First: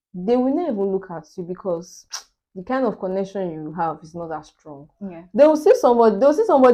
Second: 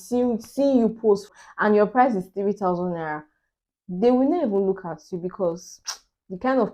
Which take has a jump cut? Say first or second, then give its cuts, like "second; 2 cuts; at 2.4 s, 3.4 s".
second; 1 cut; at 1.4 s